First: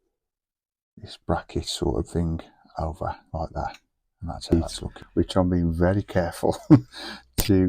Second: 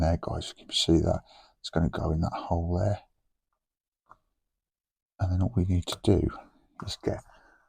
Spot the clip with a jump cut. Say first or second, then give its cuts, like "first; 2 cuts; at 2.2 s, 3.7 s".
first; 1 cut; at 4.5 s